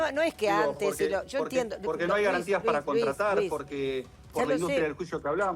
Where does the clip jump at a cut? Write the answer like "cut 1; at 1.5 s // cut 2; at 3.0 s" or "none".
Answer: none